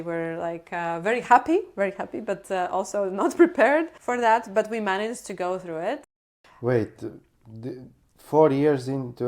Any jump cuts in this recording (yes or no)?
yes